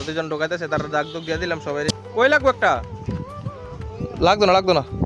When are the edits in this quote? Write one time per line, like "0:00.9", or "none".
0:02.0